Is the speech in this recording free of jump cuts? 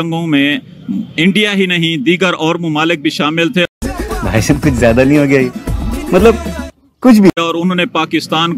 yes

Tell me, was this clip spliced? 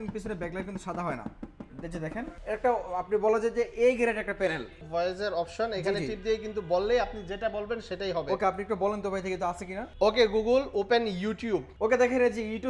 yes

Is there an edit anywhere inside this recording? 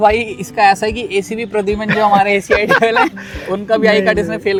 no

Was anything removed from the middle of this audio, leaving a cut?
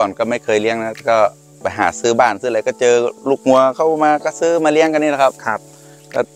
no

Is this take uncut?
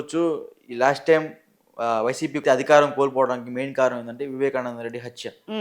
no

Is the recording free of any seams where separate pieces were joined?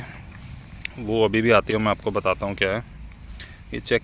yes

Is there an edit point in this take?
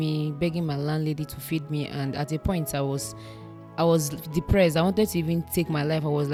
no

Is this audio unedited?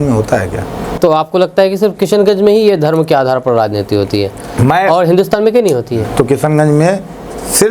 no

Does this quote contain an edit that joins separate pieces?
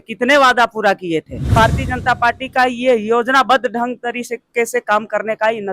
yes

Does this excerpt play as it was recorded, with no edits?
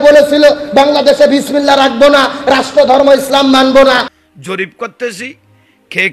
no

